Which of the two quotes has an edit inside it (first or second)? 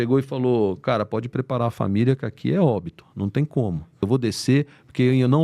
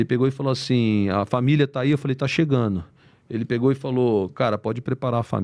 first